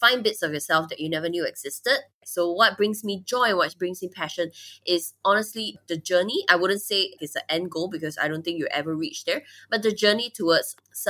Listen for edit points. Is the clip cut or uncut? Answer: cut